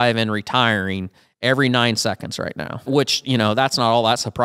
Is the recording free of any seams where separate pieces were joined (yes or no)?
no